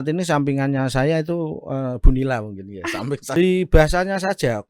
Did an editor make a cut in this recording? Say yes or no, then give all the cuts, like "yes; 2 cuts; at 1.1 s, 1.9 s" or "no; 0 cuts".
yes; 1 cut; at 3.4 s